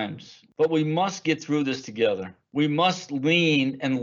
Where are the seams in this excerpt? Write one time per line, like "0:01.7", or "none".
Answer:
none

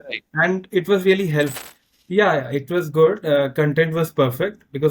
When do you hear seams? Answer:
0:01.5

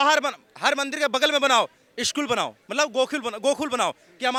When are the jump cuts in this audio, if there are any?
none

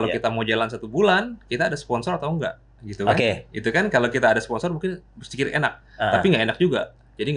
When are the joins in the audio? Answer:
none

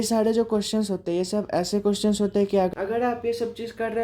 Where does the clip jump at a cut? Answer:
0:02.7

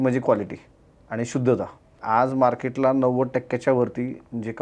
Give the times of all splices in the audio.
0:02.0

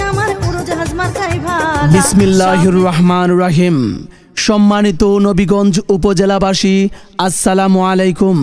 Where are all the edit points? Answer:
0:01.8

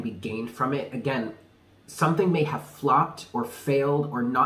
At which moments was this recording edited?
none

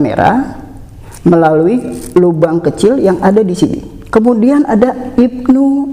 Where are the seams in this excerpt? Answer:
0:04.0

